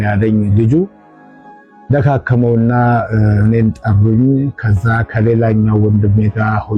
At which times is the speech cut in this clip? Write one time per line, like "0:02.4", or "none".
none